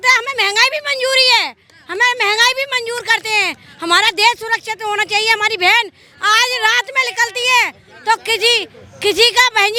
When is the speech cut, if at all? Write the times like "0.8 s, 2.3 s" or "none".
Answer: none